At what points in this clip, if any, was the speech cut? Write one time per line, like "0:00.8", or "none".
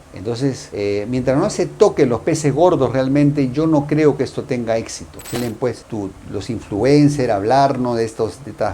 0:05.4